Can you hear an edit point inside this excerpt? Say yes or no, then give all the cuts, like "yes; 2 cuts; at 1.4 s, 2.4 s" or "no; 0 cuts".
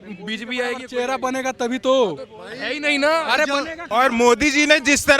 yes; 1 cut; at 3.8 s